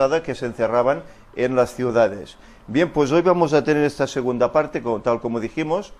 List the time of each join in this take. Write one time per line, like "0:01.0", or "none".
none